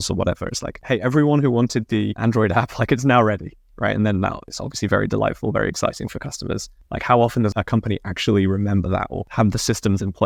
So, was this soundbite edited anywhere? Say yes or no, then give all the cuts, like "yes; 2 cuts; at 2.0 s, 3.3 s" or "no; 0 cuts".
no; 0 cuts